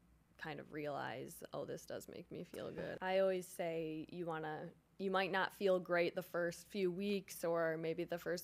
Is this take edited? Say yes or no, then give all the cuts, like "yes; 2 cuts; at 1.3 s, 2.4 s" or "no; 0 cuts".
yes; 1 cut; at 3.0 s